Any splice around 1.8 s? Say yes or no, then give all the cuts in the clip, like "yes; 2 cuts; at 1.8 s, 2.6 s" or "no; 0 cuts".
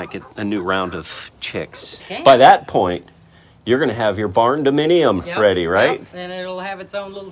yes; 1 cut; at 1.8 s